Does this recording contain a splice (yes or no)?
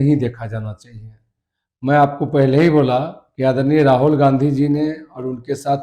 no